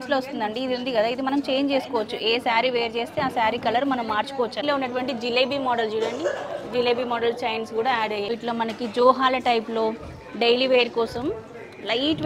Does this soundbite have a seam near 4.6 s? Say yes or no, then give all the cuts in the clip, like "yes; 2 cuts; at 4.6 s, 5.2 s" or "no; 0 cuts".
yes; 2 cuts; at 4.6 s, 8.3 s